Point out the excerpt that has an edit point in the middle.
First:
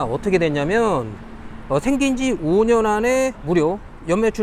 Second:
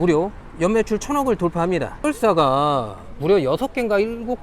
second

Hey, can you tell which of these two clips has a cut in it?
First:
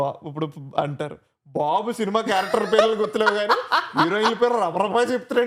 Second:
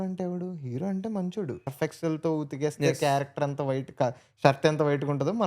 second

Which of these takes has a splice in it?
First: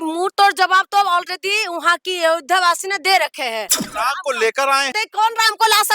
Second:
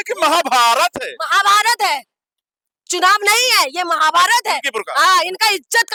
first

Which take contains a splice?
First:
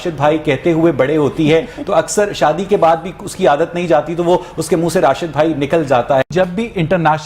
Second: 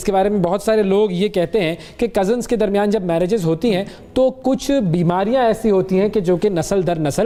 first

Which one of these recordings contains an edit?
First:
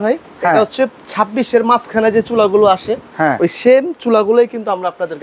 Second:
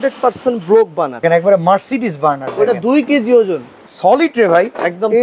second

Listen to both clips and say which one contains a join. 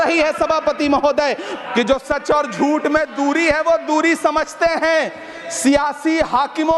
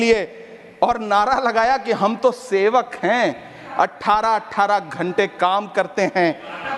first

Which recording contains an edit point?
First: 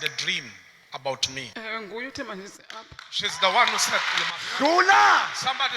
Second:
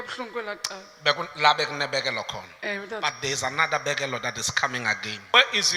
first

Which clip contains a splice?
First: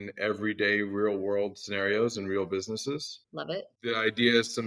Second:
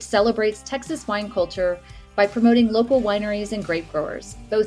first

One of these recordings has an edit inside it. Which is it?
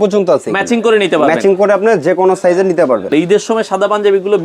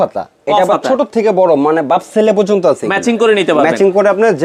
first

